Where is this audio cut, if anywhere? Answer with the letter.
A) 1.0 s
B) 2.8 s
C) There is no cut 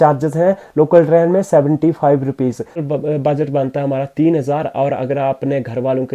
B